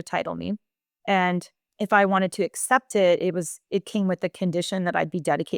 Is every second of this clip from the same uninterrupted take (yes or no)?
yes